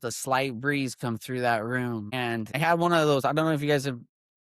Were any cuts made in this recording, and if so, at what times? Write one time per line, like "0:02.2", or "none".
0:02.6